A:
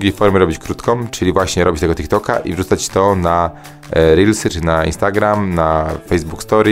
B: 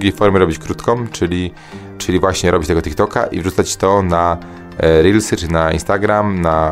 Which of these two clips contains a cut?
A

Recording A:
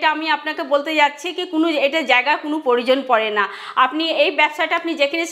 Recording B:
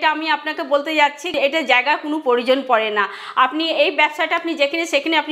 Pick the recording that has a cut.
B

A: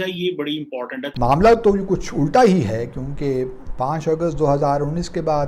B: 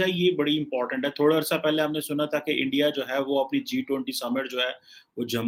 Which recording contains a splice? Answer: A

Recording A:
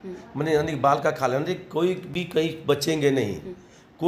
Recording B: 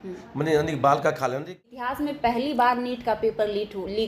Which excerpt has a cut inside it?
B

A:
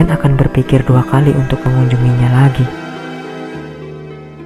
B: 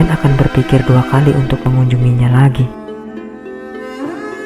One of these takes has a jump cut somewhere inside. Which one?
B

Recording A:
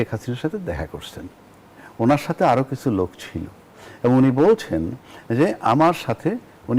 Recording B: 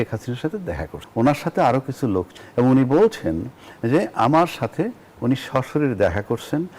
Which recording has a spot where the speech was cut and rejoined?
B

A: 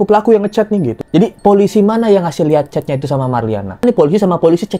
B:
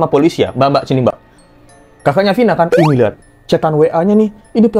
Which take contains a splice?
A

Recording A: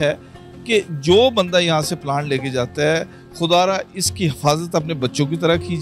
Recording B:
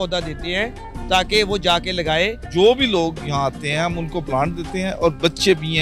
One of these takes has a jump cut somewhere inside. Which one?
B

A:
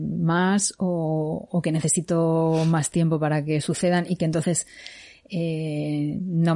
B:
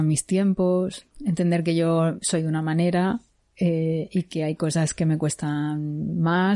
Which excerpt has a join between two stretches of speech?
B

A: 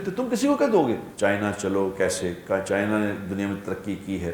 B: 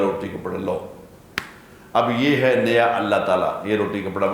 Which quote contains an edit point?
A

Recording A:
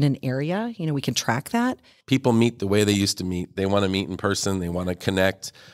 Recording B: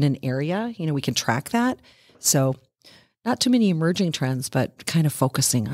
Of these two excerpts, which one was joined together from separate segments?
A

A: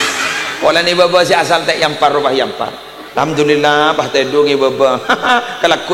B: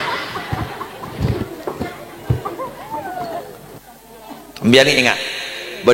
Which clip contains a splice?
B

